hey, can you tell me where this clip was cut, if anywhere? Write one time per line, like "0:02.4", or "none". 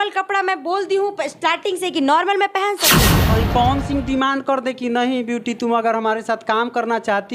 0:03.1